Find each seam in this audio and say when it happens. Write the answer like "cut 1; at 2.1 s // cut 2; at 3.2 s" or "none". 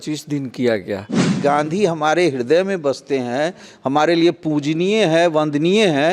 cut 1; at 1.3 s